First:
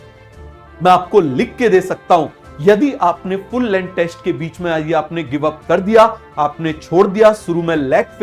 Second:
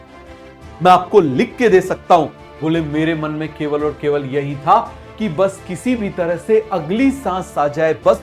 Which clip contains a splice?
second; 1 cut; at 2.4 s

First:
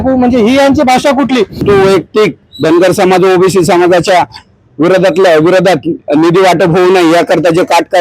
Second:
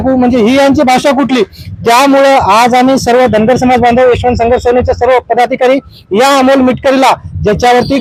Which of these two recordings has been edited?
first; 1 cut; at 1.6 s

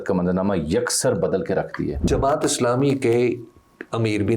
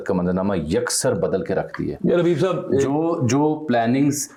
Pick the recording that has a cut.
first; 1 cut; at 2.1 s

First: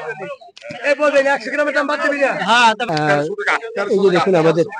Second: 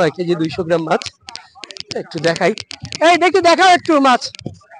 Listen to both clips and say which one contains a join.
first; 1 cut; at 2.9 s

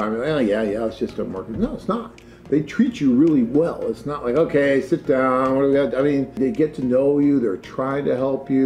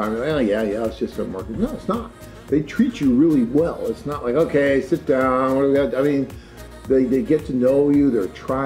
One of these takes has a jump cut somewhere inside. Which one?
first; 1 cut; at 6.4 s

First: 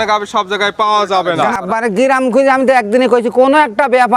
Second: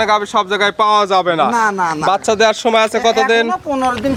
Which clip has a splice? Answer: first; 1 cut; at 1.5 s

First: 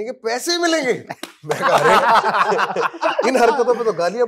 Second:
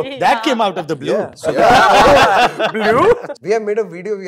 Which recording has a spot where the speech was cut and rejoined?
second; 1 cut; at 3.3 s

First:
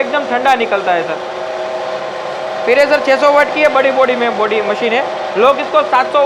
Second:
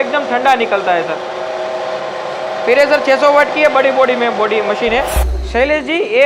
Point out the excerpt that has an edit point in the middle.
second; 1 cut; at 5.2 s

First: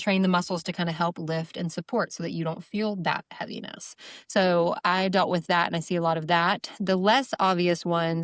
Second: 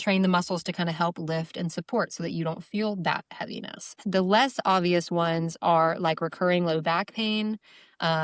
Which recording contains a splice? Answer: second; 1 cut; at 4.0 s

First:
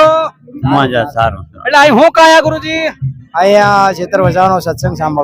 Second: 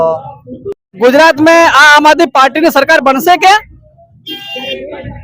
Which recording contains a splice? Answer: second; 1 cut; at 1.0 s

